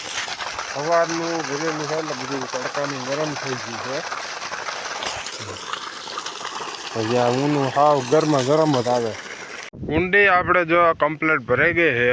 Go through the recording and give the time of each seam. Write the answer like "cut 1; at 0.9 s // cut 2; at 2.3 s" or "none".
cut 1; at 9.7 s